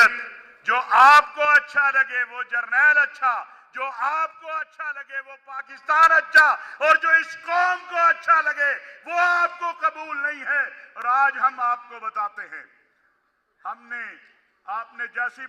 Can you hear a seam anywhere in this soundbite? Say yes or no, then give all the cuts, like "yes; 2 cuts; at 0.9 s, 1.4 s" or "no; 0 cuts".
no; 0 cuts